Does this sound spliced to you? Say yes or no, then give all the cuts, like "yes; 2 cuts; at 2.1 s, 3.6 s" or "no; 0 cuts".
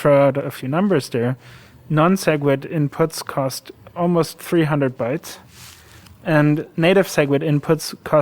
no; 0 cuts